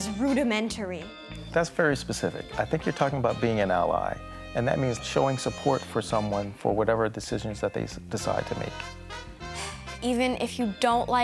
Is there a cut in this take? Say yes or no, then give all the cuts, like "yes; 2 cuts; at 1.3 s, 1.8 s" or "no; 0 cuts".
yes; 1 cut; at 1.0 s